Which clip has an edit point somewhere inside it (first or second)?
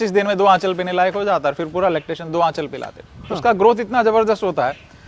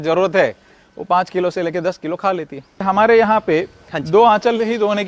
second